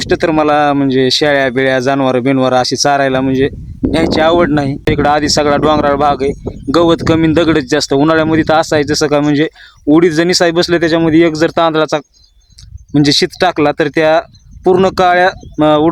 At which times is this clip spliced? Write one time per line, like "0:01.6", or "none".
0:04.8